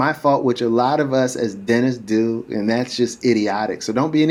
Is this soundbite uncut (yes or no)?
yes